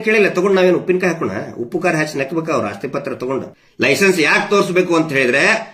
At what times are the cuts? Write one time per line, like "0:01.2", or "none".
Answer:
0:03.6

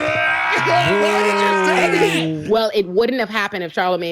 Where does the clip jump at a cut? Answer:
0:02.4

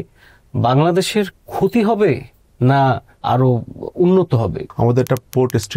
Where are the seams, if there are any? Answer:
0:03.2
0:04.6

